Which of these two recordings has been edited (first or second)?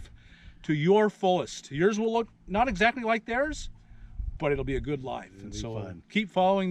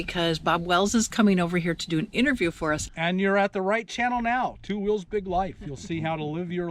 second